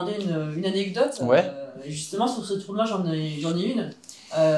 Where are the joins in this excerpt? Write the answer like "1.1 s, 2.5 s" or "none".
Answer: none

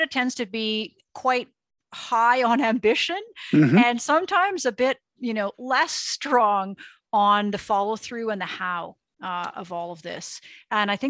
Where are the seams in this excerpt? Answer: 1.0 s

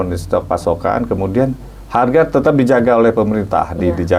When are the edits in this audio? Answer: none

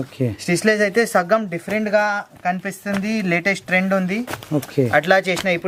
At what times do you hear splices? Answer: none

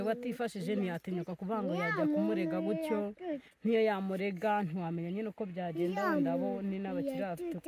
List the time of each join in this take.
none

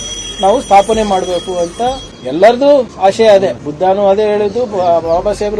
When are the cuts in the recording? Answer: 2.1 s, 2.9 s, 3.6 s

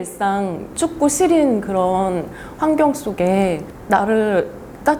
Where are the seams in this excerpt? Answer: none

